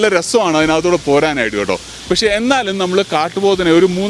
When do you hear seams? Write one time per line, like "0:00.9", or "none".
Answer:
0:01.9